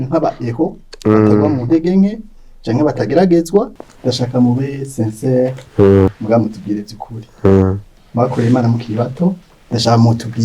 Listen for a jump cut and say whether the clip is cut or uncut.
cut